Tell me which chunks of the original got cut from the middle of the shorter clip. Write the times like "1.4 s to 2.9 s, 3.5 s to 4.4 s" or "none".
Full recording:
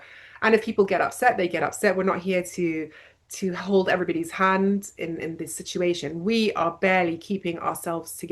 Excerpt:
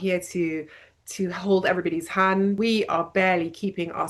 4.8 s to 6.2 s

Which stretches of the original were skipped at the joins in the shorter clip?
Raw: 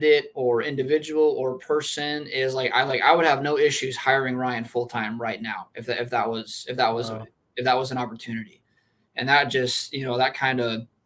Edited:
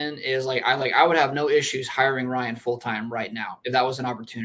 5.6 s to 7.4 s

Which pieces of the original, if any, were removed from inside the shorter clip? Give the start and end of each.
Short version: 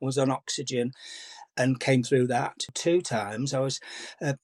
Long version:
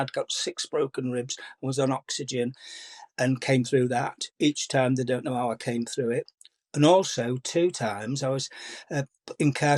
4.3 s to 7.4 s

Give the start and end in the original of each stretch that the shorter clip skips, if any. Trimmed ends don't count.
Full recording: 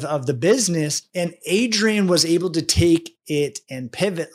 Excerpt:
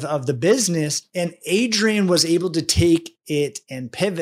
none

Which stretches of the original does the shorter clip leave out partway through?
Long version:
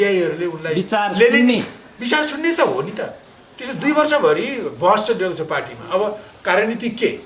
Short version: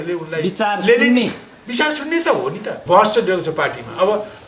3.1 s to 4.7 s

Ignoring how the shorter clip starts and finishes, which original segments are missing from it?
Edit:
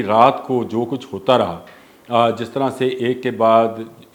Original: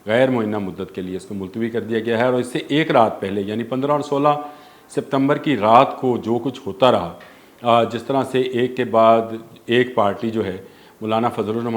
none

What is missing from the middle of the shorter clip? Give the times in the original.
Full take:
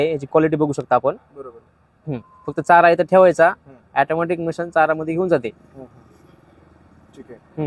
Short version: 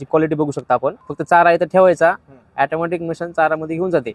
1.3 s to 2.5 s

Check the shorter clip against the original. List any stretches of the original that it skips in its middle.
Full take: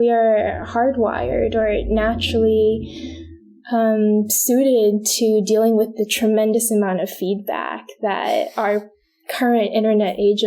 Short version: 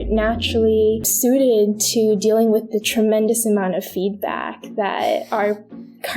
2.9 s to 4.4 s

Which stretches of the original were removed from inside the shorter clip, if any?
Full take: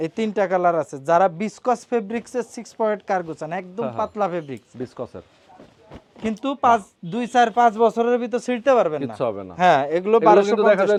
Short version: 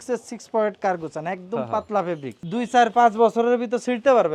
4.6 s to 7.0 s

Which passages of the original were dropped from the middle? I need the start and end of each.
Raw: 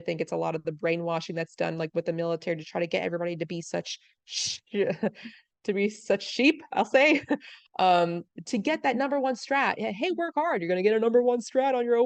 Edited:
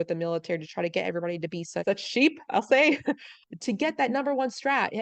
3.8 s to 6.1 s, 7.6 s to 8.2 s

